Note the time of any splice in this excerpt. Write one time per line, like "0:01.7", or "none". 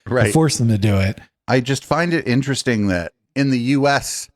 0:01.3